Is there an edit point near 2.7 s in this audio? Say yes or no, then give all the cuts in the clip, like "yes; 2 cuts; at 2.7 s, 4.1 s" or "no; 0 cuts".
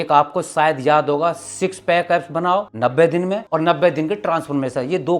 yes; 2 cuts; at 2.7 s, 3.4 s